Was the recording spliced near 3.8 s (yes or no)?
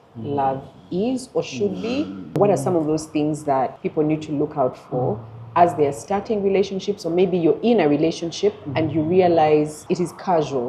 yes